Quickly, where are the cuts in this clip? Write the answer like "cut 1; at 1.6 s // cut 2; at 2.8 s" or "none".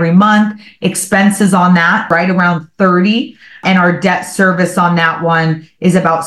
cut 1; at 2.1 s // cut 2; at 3.6 s

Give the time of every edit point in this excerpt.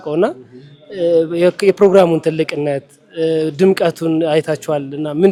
none

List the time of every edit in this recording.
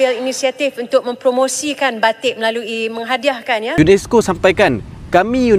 cut 1; at 3.7 s

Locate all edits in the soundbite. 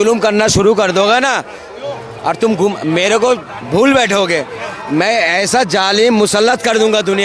none

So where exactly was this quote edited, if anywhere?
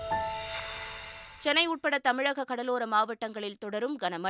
cut 1; at 0.9 s

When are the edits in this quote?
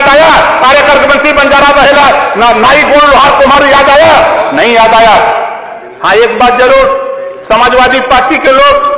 cut 1; at 5.7 s

